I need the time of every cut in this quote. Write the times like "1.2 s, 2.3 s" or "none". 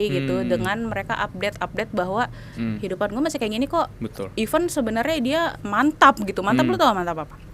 none